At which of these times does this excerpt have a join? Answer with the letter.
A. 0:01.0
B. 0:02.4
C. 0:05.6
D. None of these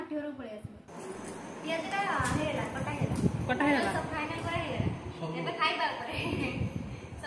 A